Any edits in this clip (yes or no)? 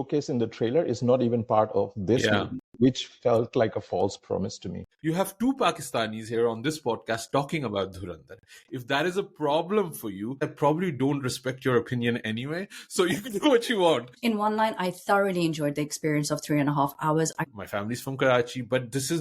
yes